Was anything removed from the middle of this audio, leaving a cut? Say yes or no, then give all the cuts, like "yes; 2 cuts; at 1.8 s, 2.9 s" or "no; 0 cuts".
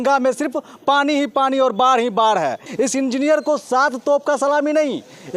yes; 1 cut; at 2.6 s